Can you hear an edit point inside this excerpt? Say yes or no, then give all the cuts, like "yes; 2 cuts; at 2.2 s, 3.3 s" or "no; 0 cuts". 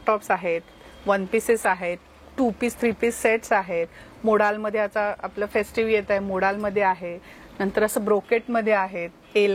no; 0 cuts